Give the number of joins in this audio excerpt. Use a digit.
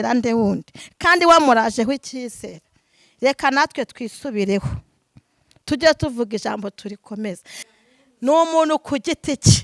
1